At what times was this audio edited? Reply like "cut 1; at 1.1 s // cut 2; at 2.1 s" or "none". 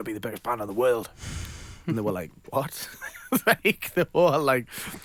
none